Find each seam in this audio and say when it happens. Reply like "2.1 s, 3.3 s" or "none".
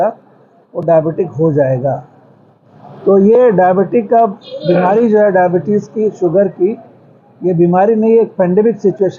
none